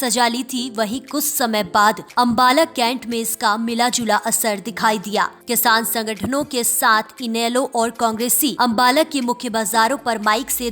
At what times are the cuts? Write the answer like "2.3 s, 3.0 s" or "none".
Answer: 2.0 s, 5.4 s, 8.5 s